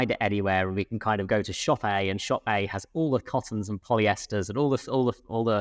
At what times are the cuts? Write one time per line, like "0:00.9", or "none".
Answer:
none